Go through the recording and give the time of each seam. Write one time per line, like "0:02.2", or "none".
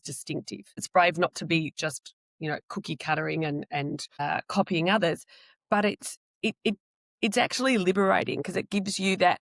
0:00.9
0:04.2